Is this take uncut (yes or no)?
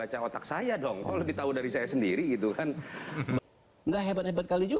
no